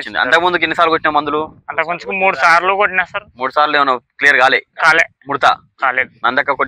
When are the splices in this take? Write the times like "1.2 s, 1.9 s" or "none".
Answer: none